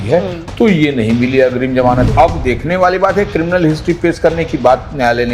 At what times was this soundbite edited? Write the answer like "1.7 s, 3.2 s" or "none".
2.1 s